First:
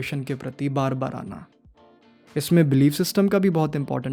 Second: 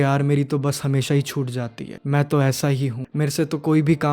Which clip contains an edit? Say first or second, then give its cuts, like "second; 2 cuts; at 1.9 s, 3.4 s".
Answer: second; 2 cuts; at 1.9 s, 3.0 s